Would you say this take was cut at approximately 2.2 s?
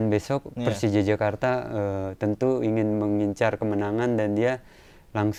no; 0 cuts

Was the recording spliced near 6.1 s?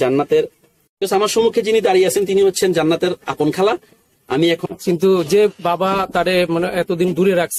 no; 2 cuts; at 0.9 s, 4.6 s

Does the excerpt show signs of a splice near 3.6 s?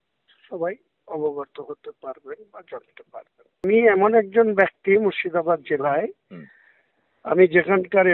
yes; 1 cut; at 3.6 s

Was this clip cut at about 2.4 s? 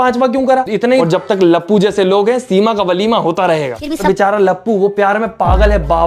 no; 2 cuts; at 1.0 s, 4.0 s

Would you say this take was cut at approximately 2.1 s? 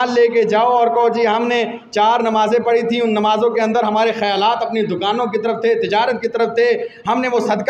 no; 0 cuts

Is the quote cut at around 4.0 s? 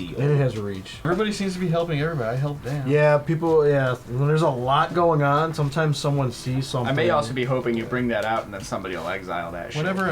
no; 1 cut; at 1.0 s

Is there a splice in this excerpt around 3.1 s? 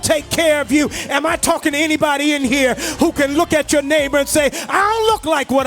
no; 0 cuts

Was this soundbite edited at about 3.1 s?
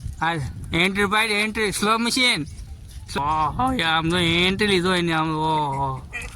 yes; 1 cut; at 3.1 s

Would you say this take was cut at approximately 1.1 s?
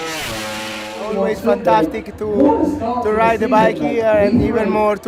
yes; 1 cut; at 1.1 s

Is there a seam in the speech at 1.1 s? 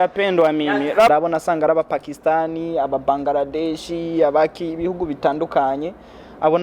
yes; 1 cut; at 1.1 s

